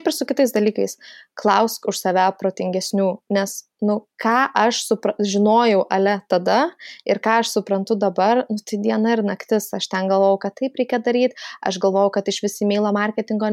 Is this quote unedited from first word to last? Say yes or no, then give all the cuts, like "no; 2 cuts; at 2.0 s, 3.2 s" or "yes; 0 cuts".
yes; 0 cuts